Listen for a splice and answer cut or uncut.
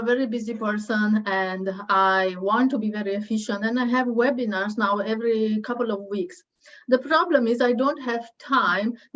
uncut